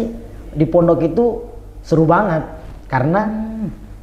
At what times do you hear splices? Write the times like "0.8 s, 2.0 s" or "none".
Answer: none